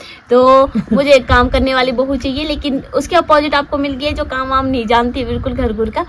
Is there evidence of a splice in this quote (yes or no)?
no